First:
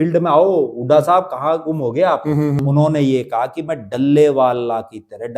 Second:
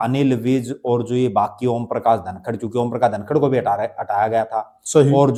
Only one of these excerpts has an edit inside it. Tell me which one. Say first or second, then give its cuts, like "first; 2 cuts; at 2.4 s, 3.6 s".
first; 1 cut; at 2.6 s